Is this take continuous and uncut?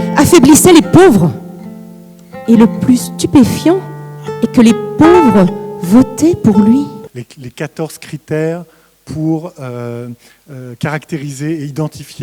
no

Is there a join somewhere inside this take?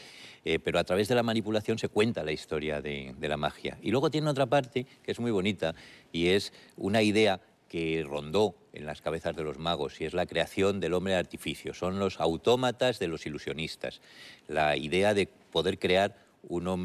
yes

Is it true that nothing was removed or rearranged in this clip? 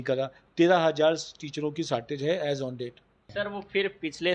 no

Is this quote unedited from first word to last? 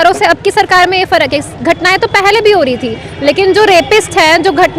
yes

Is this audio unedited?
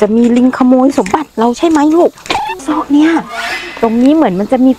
no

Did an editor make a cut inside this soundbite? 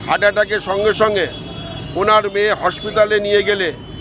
no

